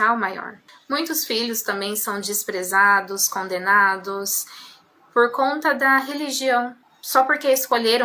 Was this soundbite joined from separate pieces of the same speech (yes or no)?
no